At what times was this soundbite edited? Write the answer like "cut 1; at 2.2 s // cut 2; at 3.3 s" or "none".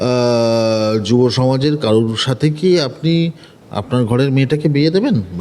none